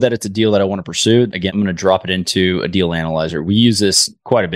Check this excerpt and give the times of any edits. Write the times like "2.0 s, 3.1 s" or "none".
1.5 s